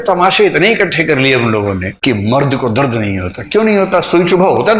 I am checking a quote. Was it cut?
no; 0 cuts

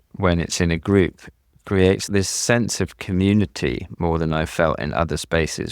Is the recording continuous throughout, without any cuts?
no; 1 cut; at 2.1 s

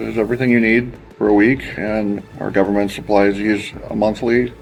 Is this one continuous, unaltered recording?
yes; 0 cuts

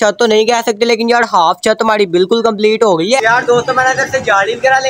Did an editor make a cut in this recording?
yes; 1 cut; at 3.2 s

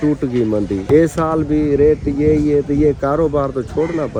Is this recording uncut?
yes; 0 cuts

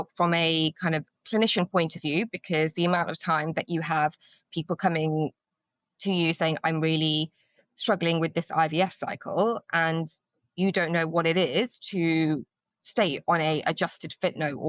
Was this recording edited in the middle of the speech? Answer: no; 0 cuts

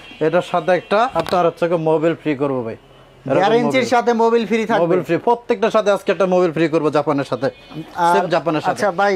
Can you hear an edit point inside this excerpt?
no; 0 cuts

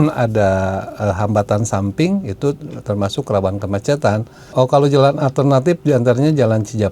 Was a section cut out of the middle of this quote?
yes; 1 cut; at 4.4 s

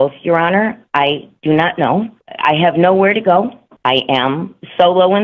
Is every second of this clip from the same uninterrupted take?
no; 2 cuts; at 2.2 s, 3.6 s

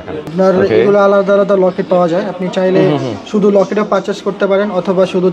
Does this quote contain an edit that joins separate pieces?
no; 0 cuts

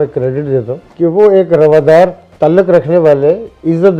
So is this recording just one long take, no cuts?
yes; 0 cuts

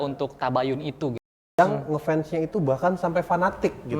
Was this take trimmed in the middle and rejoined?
yes; 1 cut; at 1.4 s

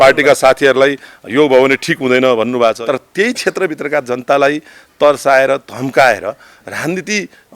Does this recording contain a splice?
yes; 1 cut; at 2.8 s

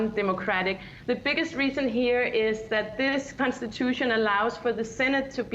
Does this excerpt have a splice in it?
yes; 1 cut; at 1.5 s

